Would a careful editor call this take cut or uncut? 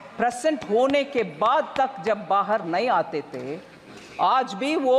uncut